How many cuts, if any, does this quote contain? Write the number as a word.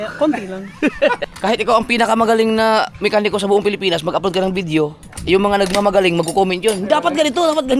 one